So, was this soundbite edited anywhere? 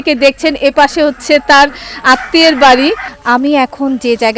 yes; 1 cut; at 3.1 s

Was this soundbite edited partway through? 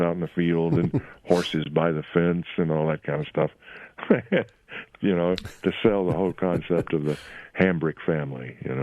no; 0 cuts

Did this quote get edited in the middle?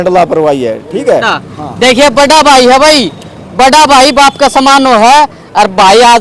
yes; 1 cut; at 1.2 s

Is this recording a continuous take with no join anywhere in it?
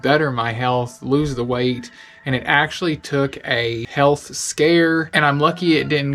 yes; 0 cuts

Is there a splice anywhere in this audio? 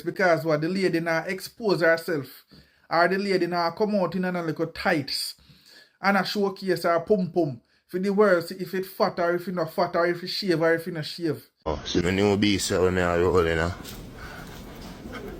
yes; 1 cut; at 11.7 s

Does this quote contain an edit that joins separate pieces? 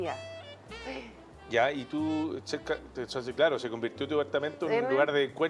no; 0 cuts

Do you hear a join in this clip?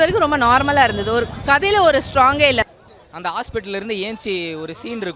yes; 1 cut; at 2.6 s

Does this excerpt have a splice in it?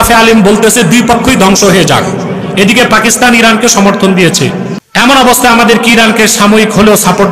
yes; 1 cut; at 4.8 s

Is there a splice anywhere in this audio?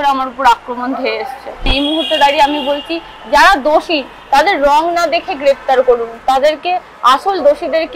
yes; 1 cut; at 1.7 s

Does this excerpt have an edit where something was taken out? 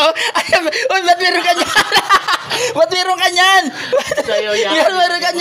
no; 0 cuts

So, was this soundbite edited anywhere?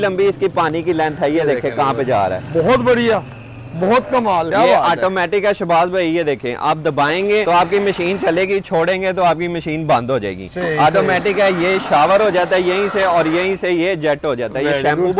no; 0 cuts

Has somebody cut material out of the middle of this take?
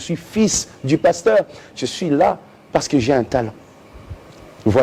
no; 0 cuts

